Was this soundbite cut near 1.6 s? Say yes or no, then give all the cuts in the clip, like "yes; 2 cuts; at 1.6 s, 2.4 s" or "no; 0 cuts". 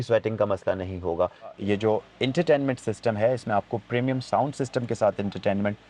yes; 1 cut; at 1.6 s